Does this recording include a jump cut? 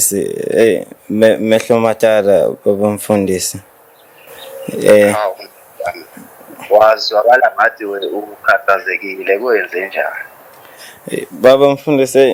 no; 0 cuts

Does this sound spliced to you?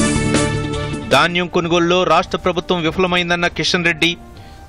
yes; 1 cut; at 0.9 s

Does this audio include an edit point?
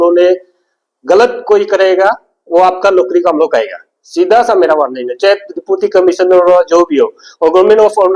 no; 0 cuts

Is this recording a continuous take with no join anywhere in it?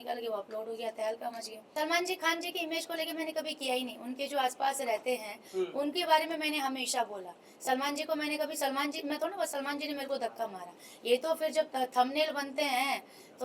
no; 1 cut; at 1.6 s

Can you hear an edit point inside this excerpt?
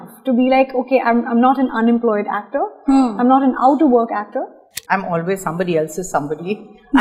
yes; 1 cut; at 4.7 s

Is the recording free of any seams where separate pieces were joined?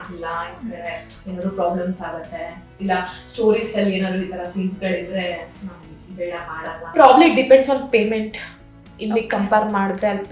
no; 1 cut; at 6.9 s

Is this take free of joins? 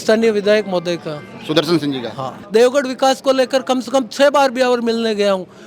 no; 1 cut; at 2.3 s

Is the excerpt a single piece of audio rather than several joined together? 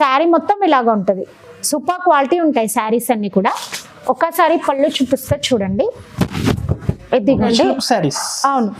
no; 1 cut; at 7.5 s

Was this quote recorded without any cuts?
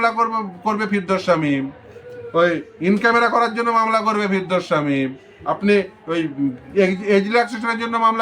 yes; 0 cuts

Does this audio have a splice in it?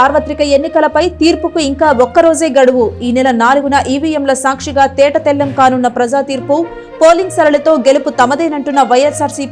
no; 0 cuts

